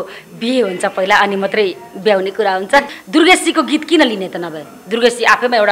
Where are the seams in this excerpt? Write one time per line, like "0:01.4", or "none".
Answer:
0:02.9

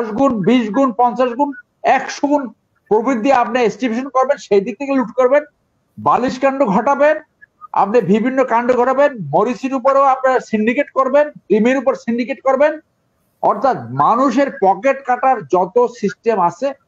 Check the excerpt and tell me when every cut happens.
none

